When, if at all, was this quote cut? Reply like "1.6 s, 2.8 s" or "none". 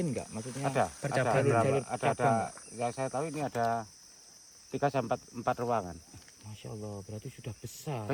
none